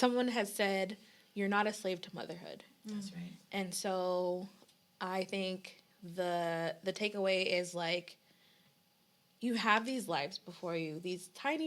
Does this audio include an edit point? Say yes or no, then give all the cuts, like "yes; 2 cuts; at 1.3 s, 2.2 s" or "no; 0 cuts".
no; 0 cuts